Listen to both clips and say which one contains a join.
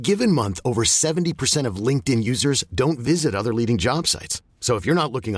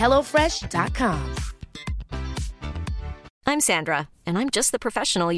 second; 1 cut; at 3.3 s

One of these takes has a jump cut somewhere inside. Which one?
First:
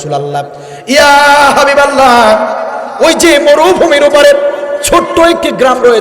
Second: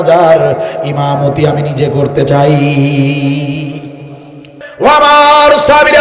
second; 1 cut; at 4.6 s

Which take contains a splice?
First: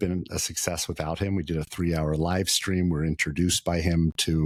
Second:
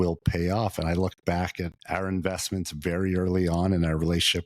second; 1 cut; at 1.8 s

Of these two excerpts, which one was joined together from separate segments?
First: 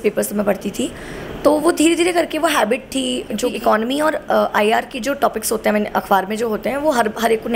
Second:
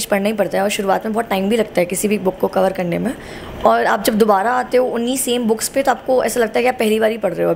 first; 1 cut; at 3.5 s

